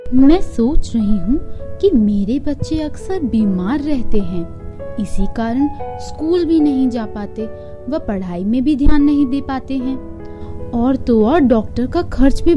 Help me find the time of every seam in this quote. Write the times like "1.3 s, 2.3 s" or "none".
none